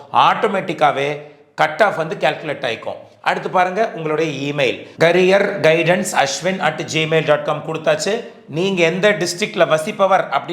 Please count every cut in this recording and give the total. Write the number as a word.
zero